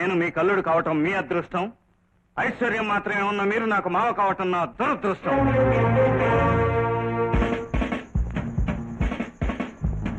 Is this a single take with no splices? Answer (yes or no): yes